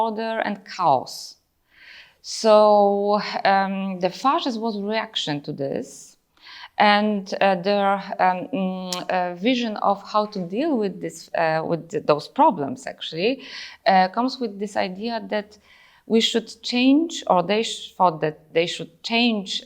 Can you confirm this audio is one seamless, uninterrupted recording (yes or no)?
yes